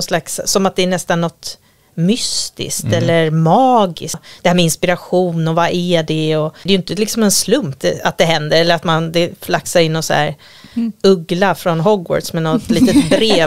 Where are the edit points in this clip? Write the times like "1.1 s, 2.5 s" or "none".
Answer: 4.3 s, 6.5 s, 7.8 s